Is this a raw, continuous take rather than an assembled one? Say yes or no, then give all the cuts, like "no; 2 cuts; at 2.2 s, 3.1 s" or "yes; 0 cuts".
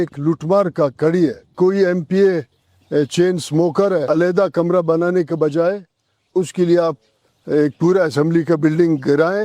no; 2 cuts; at 1.5 s, 4.0 s